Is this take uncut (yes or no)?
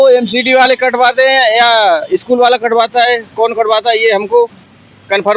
yes